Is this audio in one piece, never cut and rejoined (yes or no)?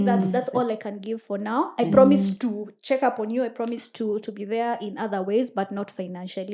yes